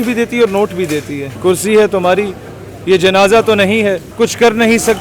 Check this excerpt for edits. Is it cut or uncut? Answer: cut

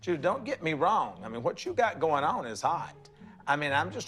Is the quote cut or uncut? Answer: uncut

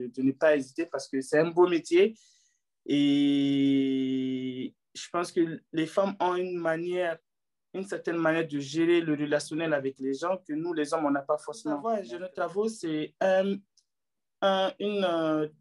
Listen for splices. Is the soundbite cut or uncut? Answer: cut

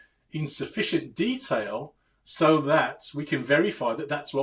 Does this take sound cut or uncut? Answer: uncut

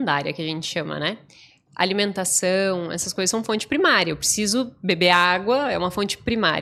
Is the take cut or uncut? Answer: uncut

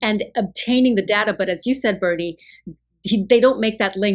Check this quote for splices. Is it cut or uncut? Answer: uncut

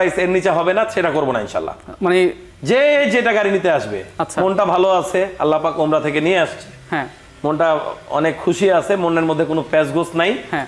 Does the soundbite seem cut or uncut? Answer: uncut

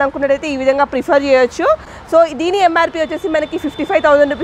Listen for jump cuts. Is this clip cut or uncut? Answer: uncut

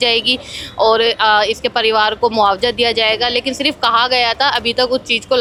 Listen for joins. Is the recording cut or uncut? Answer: uncut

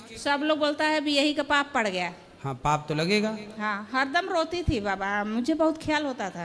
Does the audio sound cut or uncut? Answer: uncut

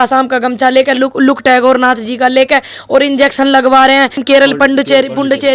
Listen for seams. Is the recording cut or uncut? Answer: cut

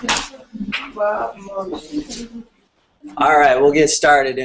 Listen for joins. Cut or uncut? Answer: uncut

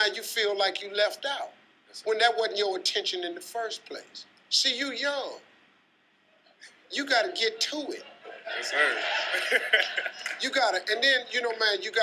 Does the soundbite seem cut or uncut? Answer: cut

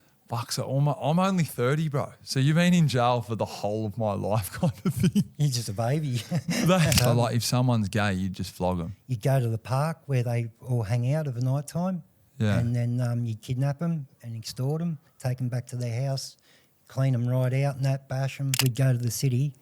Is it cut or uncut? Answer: cut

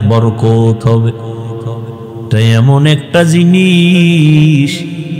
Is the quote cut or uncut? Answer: uncut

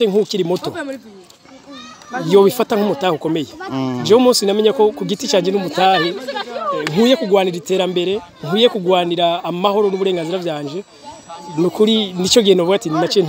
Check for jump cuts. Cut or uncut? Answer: uncut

